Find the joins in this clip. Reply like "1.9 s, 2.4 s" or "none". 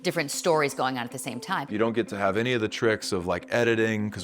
1.7 s